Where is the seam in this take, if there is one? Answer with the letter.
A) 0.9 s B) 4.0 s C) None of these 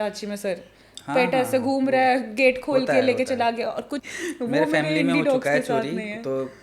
B